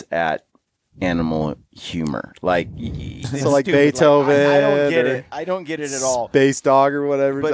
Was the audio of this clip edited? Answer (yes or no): yes